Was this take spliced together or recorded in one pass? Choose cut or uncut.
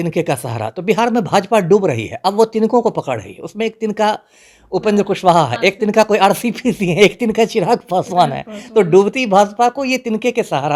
uncut